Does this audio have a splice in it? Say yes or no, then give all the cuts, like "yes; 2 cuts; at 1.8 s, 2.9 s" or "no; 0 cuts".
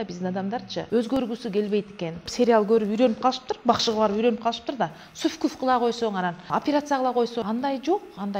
yes; 4 cuts; at 0.9 s, 2.3 s, 6.4 s, 7.4 s